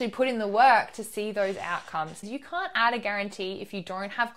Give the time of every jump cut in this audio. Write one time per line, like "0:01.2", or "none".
0:02.2